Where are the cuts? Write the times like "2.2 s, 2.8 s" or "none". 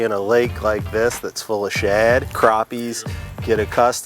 2.3 s